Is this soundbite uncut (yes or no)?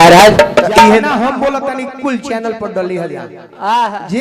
no